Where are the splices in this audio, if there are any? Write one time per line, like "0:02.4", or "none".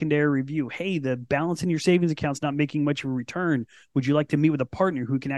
none